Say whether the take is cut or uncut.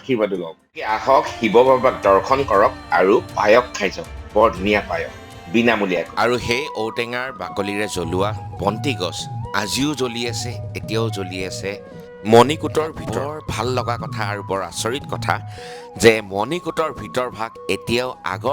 cut